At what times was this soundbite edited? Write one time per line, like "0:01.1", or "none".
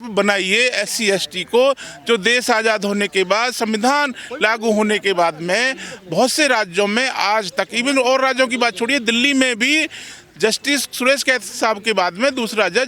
none